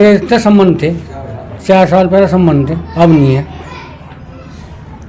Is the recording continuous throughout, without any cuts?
yes; 0 cuts

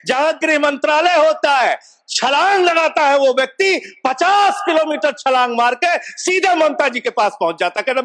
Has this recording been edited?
no; 0 cuts

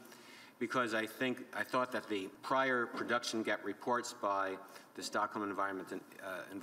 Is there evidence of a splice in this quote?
no; 0 cuts

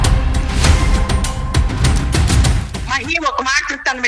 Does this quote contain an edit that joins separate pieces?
yes; 1 cut; at 2.3 s

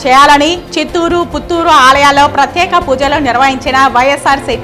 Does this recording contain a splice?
no; 0 cuts

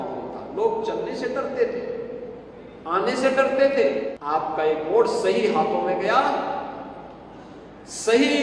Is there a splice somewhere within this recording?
yes; 1 cut; at 4.1 s

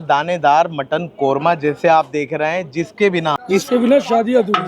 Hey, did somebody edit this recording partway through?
yes; 1 cut; at 3.4 s

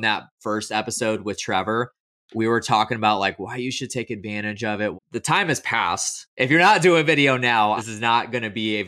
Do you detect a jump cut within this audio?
yes; 3 cuts; at 4.9 s, 6.2 s, 7.8 s

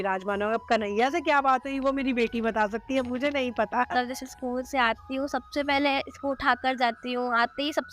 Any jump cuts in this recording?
yes; 1 cut; at 3.9 s

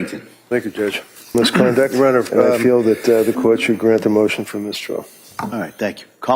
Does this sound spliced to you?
yes; 1 cut; at 2.6 s

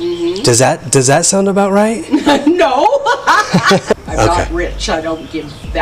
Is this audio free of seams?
no; 1 cut; at 3.9 s

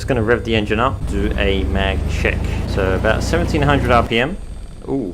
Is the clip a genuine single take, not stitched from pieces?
no; 2 cuts; at 1.0 s, 2.7 s

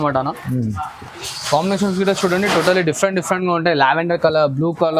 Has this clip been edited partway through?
no; 0 cuts

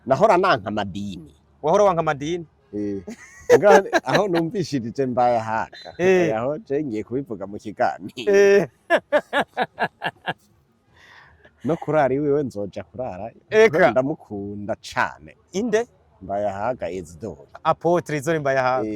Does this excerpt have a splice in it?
no; 0 cuts

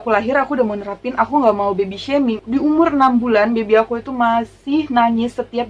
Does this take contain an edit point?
yes; 1 cut; at 2.4 s

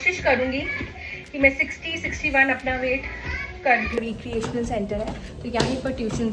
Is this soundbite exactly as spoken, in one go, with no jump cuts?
no; 1 cut; at 4.0 s

